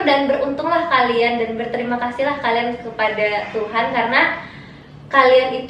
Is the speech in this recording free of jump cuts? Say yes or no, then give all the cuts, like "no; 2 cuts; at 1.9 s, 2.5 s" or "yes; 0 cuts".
yes; 0 cuts